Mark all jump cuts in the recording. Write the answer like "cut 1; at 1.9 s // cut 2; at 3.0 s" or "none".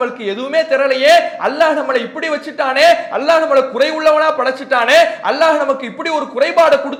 none